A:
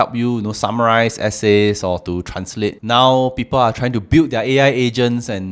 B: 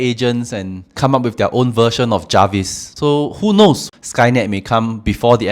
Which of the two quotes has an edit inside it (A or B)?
B